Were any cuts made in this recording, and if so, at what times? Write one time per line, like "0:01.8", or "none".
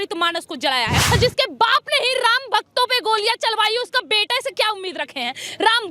0:01.0